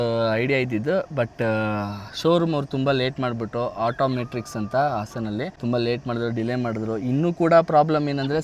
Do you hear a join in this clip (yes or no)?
yes